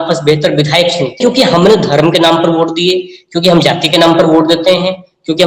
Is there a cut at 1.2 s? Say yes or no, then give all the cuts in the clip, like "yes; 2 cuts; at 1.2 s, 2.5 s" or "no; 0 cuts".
yes; 1 cut; at 1.2 s